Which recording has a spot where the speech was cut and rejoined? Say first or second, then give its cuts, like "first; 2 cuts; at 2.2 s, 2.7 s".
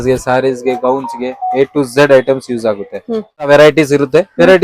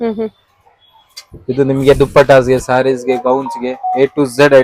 first; 1 cut; at 3.5 s